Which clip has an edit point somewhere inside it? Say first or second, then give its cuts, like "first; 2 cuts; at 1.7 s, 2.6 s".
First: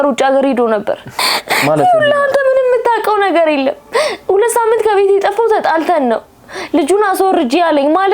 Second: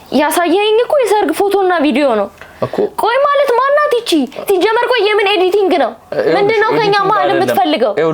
first; 1 cut; at 1.2 s